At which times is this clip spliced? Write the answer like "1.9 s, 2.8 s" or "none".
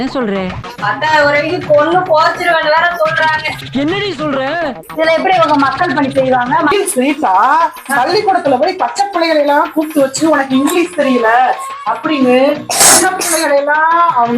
6.7 s